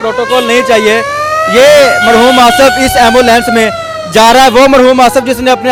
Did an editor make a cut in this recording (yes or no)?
no